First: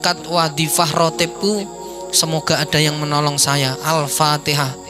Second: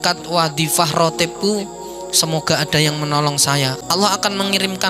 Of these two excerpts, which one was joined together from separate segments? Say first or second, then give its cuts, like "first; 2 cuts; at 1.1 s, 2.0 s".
second; 1 cut; at 3.8 s